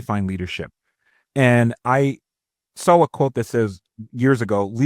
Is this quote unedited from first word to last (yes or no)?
yes